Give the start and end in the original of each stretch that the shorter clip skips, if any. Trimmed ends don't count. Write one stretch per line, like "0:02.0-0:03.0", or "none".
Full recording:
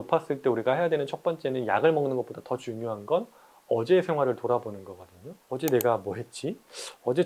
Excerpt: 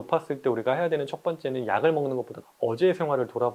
0:02.4-0:03.5